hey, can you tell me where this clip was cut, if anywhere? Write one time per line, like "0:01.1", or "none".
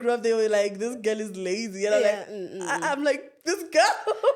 none